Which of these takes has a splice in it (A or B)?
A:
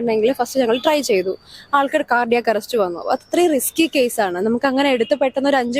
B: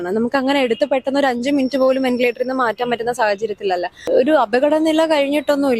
B